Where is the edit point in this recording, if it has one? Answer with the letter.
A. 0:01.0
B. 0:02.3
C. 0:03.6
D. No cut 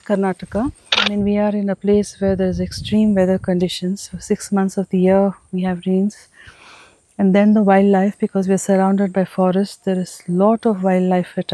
A